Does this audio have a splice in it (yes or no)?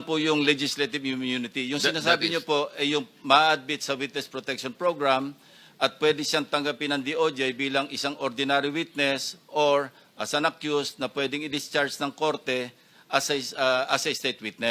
no